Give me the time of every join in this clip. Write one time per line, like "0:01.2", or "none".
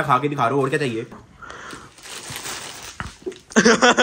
0:01.1